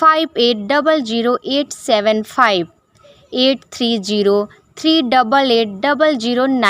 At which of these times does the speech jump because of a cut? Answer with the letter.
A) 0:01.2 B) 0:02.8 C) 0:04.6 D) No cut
D